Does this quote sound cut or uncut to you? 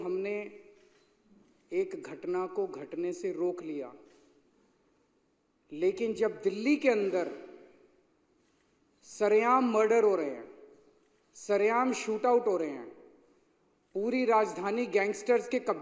uncut